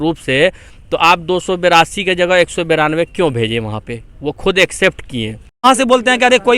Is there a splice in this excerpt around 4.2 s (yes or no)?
no